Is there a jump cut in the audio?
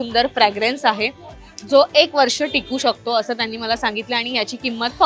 no; 0 cuts

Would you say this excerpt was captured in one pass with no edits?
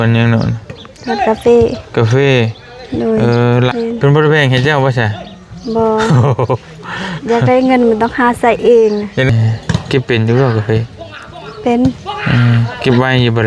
no; 2 cuts; at 3.7 s, 9.3 s

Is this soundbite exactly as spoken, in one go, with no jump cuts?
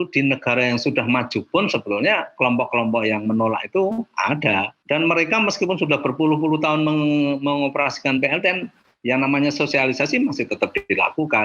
no; 1 cut; at 4.8 s

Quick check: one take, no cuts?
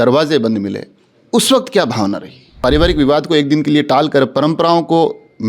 no; 1 cut; at 2.5 s

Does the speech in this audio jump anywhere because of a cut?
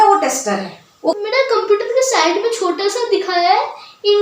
yes; 1 cut; at 1.2 s

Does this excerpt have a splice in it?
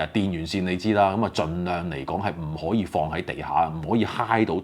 no; 0 cuts

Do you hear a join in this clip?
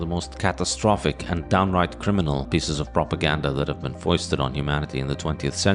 yes; 1 cut; at 2.5 s

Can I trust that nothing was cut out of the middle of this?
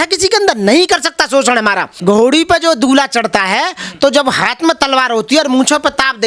no; 1 cut; at 1.9 s

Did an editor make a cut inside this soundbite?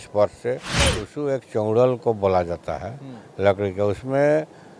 yes; 1 cut; at 0.9 s

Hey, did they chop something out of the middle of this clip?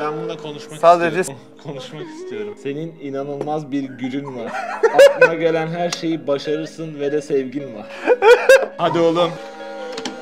no; 0 cuts

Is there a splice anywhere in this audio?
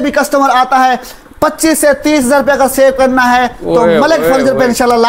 no; 0 cuts

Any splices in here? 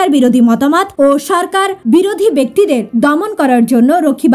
yes; 2 cuts; at 0.9 s, 1.8 s

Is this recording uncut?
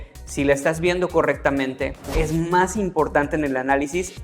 no; 1 cut; at 2.1 s

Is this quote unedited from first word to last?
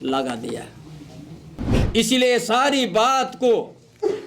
no; 1 cut; at 1.8 s

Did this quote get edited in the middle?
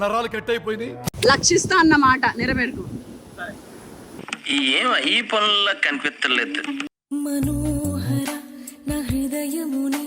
yes; 2 cuts; at 1.1 s, 6.9 s

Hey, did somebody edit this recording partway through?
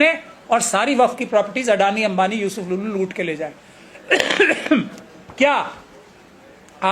no; 0 cuts

